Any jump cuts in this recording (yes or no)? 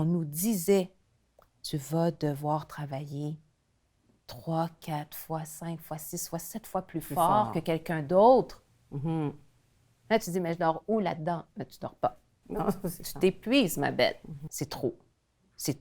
yes